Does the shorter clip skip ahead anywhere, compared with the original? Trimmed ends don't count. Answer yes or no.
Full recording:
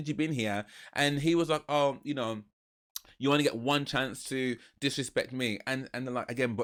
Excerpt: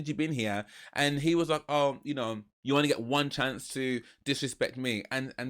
yes